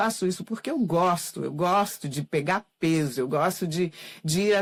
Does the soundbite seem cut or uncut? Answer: uncut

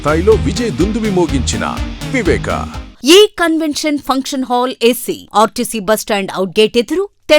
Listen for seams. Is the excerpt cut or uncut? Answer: cut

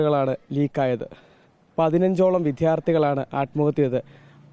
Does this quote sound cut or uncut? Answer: uncut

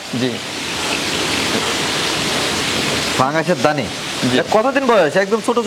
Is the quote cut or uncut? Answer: uncut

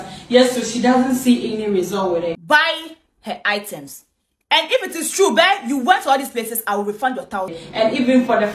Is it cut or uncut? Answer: cut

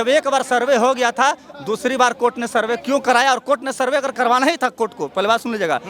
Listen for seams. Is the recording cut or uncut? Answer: uncut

